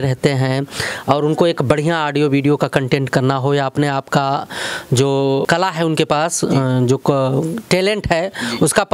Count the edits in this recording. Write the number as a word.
one